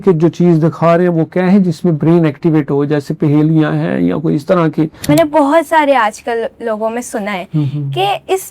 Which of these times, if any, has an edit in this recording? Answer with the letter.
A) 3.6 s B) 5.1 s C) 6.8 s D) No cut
B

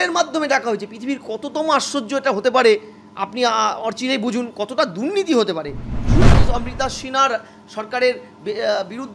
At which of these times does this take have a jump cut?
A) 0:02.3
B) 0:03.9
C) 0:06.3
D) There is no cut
C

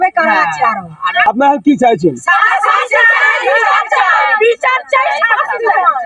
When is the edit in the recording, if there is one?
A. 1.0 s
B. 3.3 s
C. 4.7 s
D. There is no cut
D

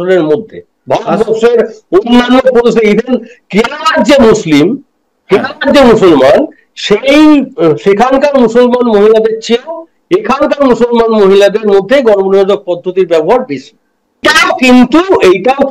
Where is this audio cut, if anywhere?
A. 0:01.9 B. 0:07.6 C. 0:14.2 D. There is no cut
C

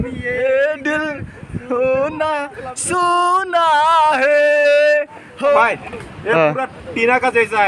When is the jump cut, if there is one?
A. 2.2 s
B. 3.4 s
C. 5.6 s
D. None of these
C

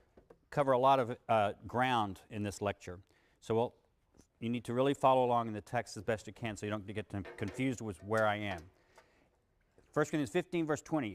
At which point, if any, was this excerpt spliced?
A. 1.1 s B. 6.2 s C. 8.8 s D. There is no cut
A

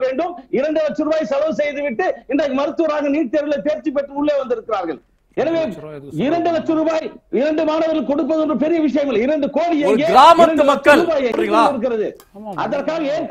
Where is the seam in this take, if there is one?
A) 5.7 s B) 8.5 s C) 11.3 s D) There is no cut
C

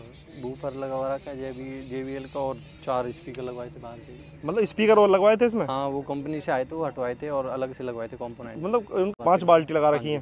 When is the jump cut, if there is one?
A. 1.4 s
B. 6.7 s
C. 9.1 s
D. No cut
C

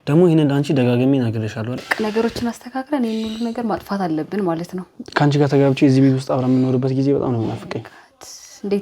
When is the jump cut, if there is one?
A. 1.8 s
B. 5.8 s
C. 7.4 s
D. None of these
A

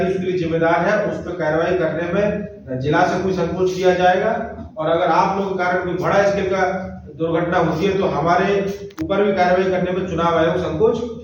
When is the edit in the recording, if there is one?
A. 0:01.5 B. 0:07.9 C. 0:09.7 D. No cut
D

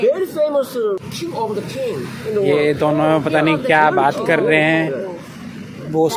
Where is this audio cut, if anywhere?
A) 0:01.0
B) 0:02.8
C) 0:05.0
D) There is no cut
A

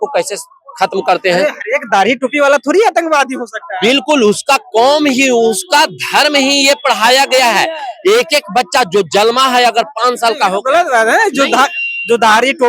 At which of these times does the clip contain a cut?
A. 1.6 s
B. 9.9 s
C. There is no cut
C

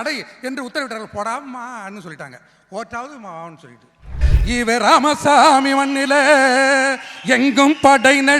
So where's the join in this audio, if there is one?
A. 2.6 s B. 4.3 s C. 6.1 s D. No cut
B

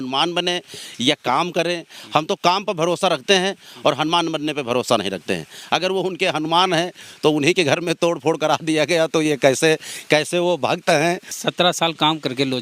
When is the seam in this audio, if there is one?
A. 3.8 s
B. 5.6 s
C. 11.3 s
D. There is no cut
C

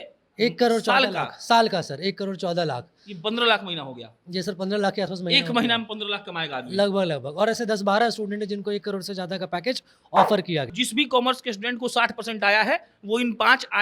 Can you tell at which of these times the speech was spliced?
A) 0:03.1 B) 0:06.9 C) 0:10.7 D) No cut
C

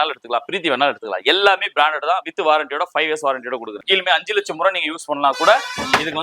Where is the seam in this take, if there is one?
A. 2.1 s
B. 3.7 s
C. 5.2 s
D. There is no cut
B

